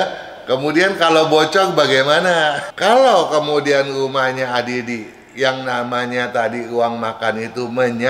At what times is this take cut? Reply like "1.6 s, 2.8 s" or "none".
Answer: 2.7 s